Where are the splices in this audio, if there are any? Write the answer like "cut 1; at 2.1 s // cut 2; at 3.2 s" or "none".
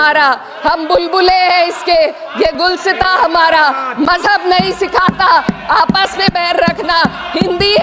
none